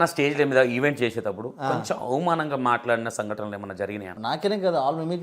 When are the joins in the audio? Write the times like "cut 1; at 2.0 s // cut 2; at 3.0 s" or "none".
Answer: cut 1; at 4.1 s